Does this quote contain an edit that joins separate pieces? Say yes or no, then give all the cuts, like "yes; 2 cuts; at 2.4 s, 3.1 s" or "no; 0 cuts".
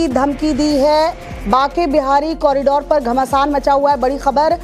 no; 0 cuts